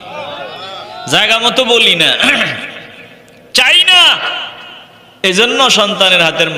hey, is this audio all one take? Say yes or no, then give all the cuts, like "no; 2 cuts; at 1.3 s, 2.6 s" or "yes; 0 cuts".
yes; 0 cuts